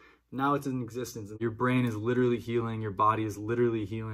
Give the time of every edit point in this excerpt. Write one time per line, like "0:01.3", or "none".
0:01.4